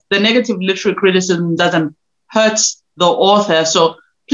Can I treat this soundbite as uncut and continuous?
yes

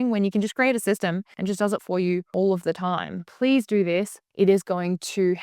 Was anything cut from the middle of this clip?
yes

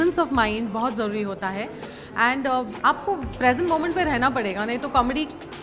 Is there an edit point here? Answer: no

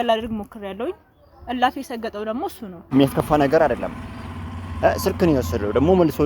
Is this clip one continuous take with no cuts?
no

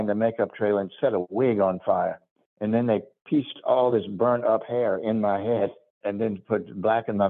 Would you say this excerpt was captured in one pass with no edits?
yes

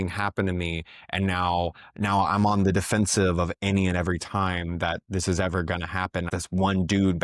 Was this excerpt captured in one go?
no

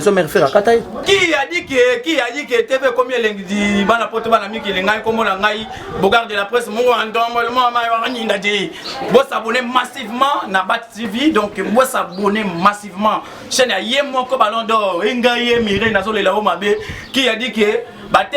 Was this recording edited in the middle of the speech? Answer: yes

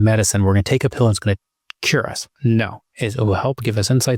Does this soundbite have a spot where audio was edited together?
yes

